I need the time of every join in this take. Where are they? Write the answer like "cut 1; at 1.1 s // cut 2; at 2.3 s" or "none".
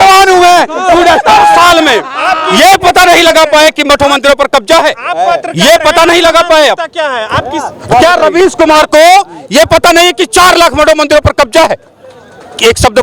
none